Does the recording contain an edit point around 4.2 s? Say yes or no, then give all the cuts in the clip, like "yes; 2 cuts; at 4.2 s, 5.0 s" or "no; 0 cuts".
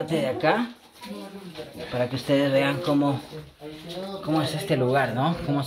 no; 0 cuts